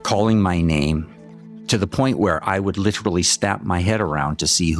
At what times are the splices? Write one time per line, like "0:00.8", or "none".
0:01.1